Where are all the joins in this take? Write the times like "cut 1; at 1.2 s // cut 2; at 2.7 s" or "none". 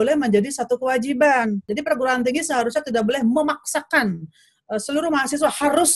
cut 1; at 1.7 s